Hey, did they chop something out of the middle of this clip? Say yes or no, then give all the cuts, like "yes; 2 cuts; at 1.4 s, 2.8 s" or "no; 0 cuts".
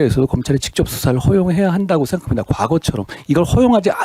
no; 0 cuts